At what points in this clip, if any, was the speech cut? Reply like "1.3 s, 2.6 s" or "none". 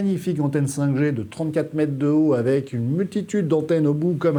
none

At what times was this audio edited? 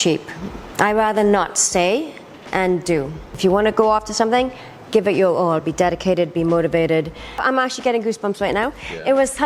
3.4 s, 7.4 s

